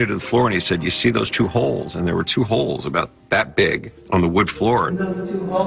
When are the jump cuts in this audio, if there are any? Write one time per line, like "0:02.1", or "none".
0:03.9
0:04.9